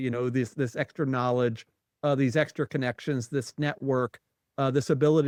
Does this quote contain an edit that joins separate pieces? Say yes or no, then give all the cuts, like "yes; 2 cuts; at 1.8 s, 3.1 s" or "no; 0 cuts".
no; 0 cuts